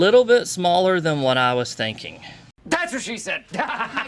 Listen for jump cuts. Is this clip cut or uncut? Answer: uncut